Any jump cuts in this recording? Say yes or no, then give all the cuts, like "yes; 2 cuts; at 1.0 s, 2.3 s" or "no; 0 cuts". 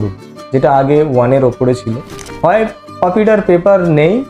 yes; 1 cut; at 2.0 s